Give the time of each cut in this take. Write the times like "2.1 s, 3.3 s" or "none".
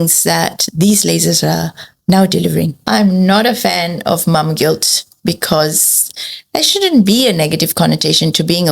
2.8 s